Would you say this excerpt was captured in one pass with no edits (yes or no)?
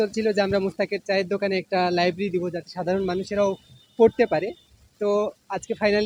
yes